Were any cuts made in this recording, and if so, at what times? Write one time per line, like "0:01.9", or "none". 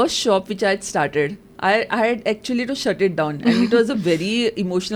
none